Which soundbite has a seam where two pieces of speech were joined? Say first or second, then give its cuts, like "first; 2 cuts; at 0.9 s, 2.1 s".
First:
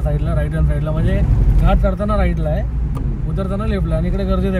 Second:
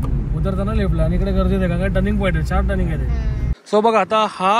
second; 1 cut; at 3.5 s